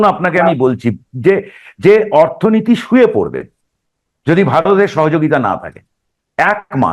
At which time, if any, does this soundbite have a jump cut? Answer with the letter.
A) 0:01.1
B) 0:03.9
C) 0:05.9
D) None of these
D